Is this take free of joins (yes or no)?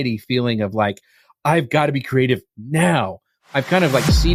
yes